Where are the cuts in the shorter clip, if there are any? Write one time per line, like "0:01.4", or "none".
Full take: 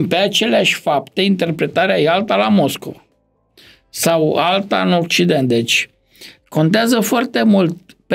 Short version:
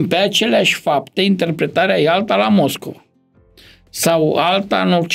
none